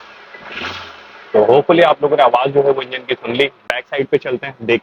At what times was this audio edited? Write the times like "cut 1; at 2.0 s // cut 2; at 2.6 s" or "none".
none